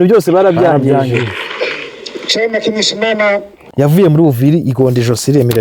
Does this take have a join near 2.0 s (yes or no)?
no